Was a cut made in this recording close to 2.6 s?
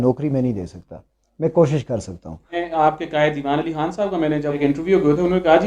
yes; 2 cuts; at 2.6 s, 4.6 s

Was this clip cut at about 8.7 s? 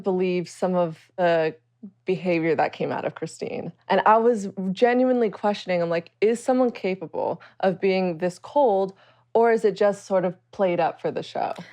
no; 1 cut; at 1.2 s

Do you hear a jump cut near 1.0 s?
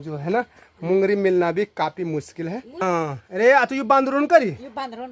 no; 1 cut; at 2.7 s

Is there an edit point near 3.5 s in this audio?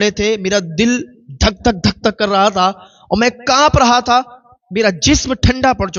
no; 0 cuts

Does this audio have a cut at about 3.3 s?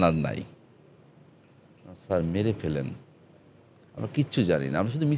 no; 1 cut; at 1.0 s

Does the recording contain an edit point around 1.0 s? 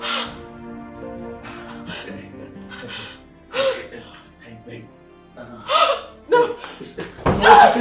yes; 1 cut; at 1.0 s

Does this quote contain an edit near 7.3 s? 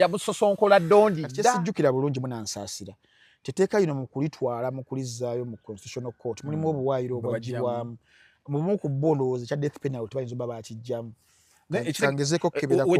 no; 1 cut; at 1.3 s

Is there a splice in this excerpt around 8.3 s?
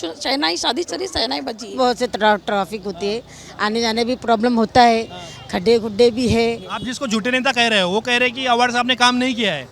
no; 2 cuts; at 1.8 s, 6.7 s

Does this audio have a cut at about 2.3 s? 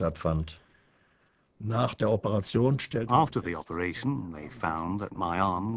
no; 1 cut; at 4.0 s

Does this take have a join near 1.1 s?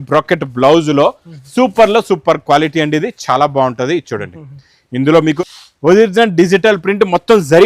no; 1 cut; at 5.4 s

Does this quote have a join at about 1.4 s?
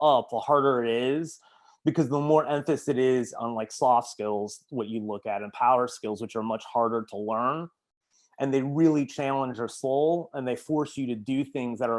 no; 0 cuts

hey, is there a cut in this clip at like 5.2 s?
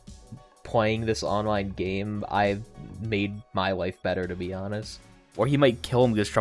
yes; 1 cut; at 5.2 s

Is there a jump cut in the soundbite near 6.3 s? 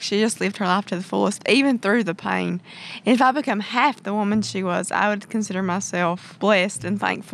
yes; 1 cut; at 6.3 s

